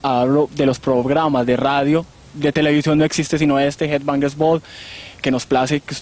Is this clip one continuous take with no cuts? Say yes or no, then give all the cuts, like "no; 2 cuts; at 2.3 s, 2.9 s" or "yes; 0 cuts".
yes; 0 cuts